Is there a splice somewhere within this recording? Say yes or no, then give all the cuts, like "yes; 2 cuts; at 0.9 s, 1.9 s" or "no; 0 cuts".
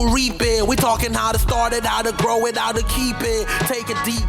no; 0 cuts